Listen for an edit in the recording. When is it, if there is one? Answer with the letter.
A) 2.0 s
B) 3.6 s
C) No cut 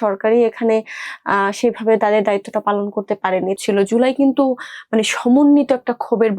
B